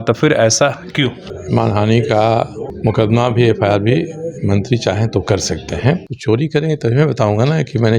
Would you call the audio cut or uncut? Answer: cut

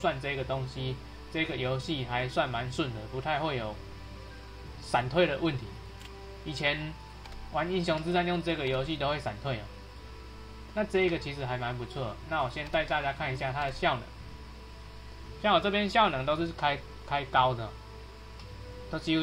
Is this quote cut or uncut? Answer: cut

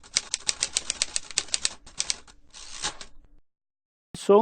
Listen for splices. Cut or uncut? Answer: cut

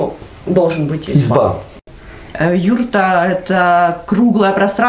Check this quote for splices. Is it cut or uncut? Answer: cut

